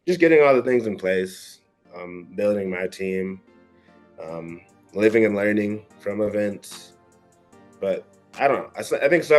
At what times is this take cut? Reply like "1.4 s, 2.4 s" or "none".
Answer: none